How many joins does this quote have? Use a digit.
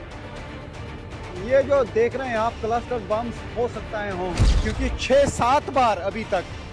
1